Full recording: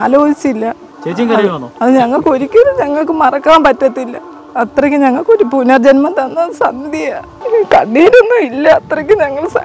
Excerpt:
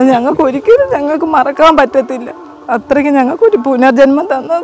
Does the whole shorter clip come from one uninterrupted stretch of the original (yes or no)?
yes